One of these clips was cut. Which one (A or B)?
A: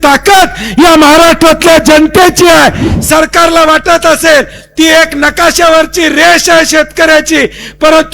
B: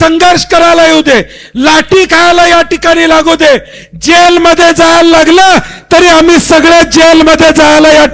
A